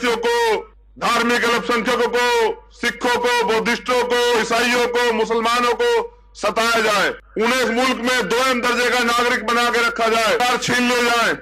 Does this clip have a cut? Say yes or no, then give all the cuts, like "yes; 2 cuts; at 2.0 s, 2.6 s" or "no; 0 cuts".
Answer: yes; 1 cut; at 10.4 s